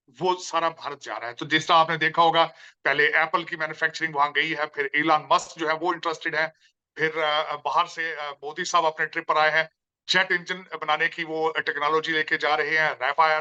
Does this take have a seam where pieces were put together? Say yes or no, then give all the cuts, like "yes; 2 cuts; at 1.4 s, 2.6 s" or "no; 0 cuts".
no; 0 cuts